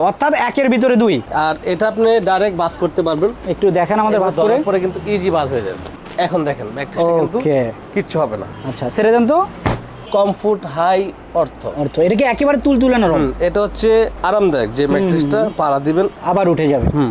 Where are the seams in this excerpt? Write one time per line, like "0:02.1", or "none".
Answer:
0:01.3
0:10.1